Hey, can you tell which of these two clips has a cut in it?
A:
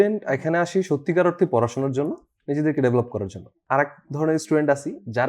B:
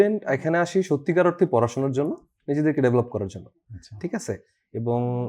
A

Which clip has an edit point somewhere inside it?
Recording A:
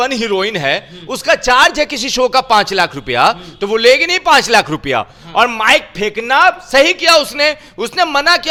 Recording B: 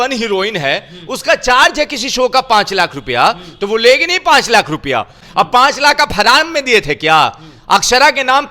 B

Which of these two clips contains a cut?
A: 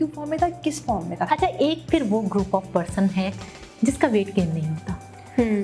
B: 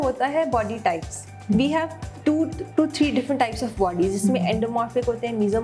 A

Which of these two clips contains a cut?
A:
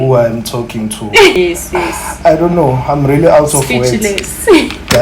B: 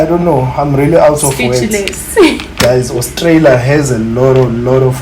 A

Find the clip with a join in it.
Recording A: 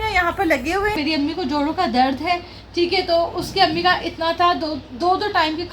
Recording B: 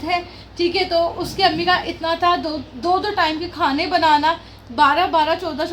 A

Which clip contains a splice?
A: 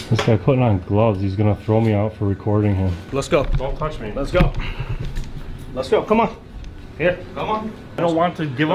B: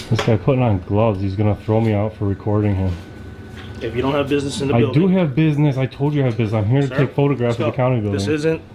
A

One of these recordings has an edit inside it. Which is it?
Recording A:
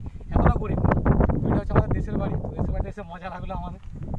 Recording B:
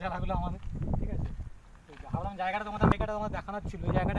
B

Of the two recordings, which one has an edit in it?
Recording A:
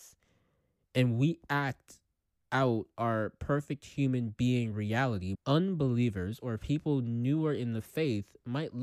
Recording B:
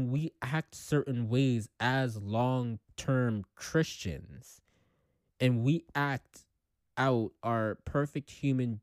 A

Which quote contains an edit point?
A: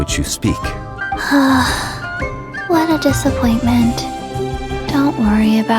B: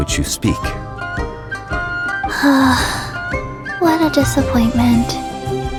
A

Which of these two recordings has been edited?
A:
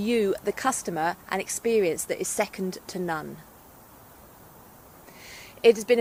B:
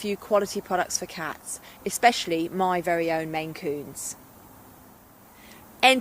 B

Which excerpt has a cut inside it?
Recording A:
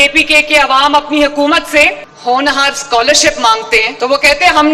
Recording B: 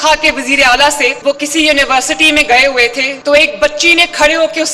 B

